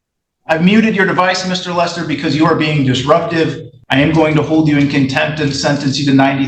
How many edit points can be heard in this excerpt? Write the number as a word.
one